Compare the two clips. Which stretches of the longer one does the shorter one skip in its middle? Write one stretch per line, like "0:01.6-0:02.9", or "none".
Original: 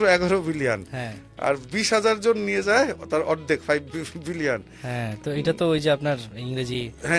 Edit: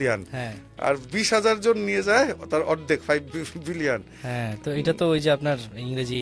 none